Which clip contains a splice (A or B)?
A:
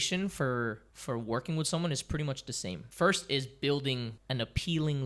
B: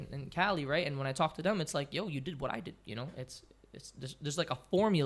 A